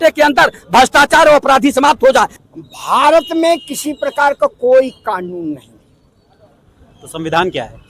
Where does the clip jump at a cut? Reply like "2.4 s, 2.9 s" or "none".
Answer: 2.4 s

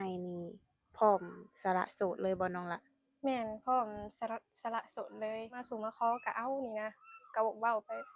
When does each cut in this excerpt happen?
5.6 s

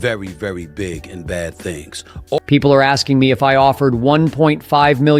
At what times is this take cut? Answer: 2.4 s

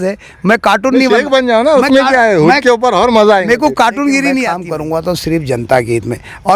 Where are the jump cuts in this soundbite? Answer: 4.7 s

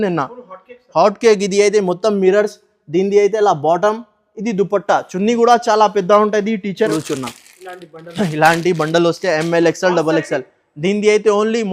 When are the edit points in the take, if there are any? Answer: 6.9 s

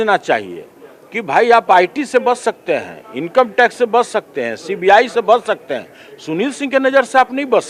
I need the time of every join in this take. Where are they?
none

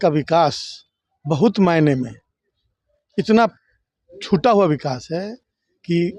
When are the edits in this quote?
none

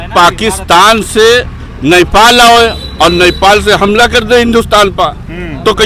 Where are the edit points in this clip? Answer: none

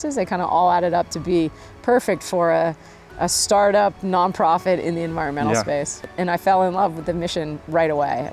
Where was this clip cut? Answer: 6.1 s

